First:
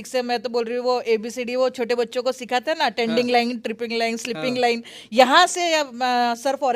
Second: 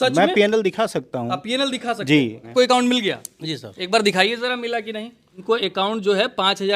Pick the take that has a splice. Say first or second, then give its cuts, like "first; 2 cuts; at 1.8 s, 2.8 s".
second; 2 cuts; at 2.5 s, 5.4 s